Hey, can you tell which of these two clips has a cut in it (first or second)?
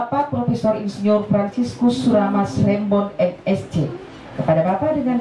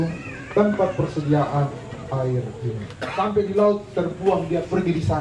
second